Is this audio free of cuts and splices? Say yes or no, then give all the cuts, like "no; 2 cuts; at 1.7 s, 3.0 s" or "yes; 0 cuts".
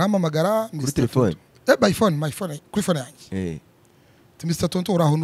yes; 0 cuts